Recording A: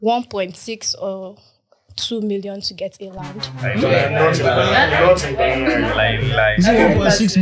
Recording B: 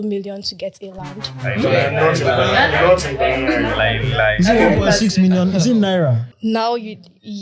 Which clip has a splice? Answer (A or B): B